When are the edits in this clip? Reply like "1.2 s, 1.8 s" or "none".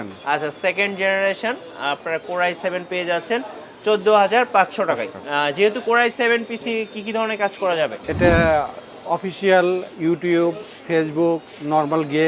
5.2 s, 8.0 s